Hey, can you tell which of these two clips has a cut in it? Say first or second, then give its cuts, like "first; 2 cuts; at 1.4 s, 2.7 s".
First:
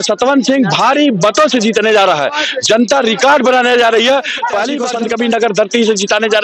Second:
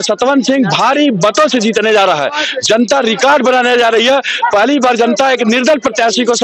first; 1 cut; at 4.8 s